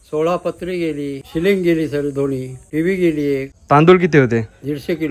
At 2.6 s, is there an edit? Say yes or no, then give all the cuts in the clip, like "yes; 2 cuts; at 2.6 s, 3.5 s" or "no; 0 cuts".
yes; 3 cuts; at 1.2 s, 2.6 s, 3.5 s